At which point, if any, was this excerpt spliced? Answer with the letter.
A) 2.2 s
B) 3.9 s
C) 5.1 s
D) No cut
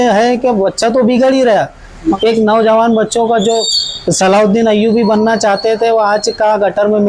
A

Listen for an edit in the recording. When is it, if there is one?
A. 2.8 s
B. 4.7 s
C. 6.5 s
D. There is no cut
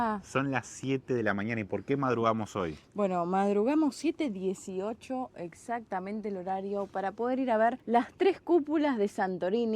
D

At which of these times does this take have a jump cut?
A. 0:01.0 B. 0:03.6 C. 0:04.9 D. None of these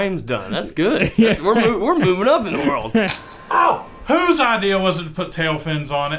B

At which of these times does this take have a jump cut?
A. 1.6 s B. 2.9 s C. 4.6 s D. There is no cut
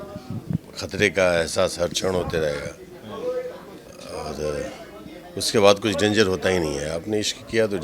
D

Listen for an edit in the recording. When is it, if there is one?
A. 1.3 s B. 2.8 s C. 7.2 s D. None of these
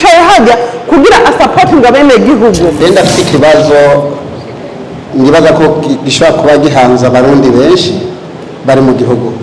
B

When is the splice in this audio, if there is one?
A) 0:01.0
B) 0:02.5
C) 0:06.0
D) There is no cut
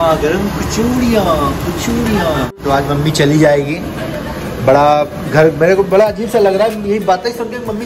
B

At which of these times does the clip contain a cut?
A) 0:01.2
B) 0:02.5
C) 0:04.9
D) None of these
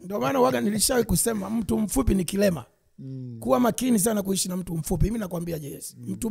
D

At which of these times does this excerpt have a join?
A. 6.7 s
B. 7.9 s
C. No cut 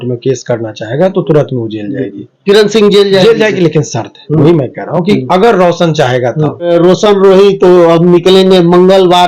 A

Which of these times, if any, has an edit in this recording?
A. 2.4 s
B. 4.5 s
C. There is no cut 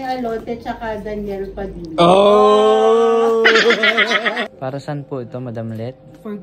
B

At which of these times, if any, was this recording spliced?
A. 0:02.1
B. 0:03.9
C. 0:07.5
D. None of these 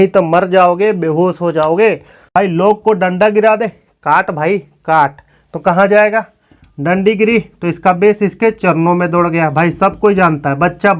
A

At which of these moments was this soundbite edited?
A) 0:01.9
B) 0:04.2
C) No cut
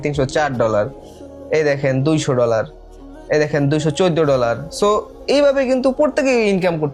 C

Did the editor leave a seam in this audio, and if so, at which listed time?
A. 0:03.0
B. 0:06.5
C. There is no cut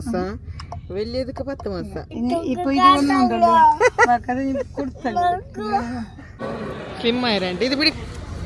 B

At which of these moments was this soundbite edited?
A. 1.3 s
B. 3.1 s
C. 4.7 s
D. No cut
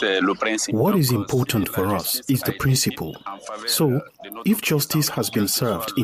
D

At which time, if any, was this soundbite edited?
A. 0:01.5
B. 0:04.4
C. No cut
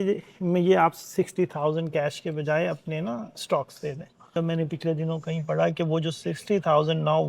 B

